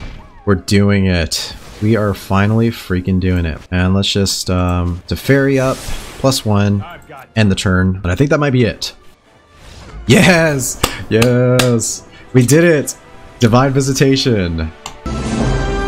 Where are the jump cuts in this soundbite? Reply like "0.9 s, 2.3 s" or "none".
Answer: 3.6 s, 8.0 s